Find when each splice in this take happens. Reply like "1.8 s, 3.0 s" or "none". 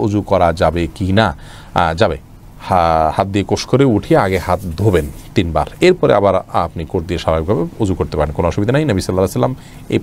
none